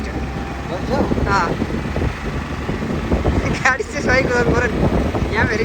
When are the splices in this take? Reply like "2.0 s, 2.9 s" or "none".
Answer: none